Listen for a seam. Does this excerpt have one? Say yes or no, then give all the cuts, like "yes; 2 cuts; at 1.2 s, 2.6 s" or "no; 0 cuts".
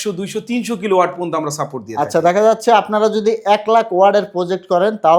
no; 0 cuts